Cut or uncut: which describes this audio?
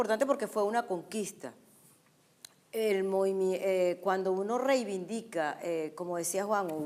cut